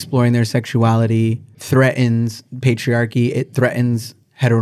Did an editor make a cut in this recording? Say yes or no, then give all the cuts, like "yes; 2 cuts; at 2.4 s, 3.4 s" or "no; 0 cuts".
no; 0 cuts